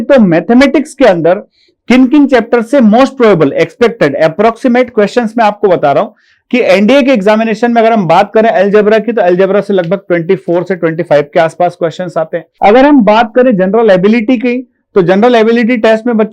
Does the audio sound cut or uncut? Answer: cut